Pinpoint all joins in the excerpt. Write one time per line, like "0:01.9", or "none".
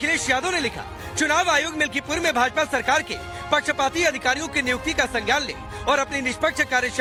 none